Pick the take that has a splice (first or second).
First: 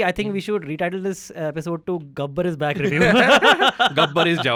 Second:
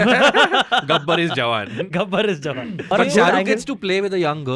second